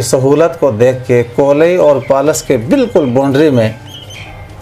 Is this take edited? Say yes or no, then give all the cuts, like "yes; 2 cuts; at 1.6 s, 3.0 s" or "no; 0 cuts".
no; 0 cuts